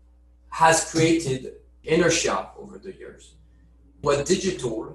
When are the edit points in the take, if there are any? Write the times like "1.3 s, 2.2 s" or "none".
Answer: 1.7 s, 4.0 s